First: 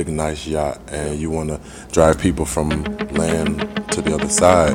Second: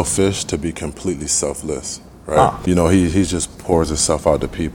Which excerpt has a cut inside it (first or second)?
second